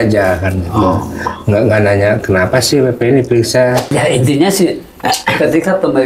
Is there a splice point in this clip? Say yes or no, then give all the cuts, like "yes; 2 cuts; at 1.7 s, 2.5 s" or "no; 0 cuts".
yes; 1 cut; at 3.8 s